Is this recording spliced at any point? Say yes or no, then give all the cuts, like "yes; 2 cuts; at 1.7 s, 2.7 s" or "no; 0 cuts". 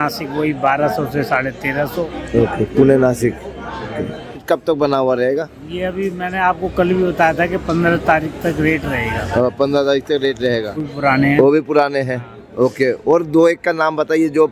yes; 2 cuts; at 4.4 s, 10.8 s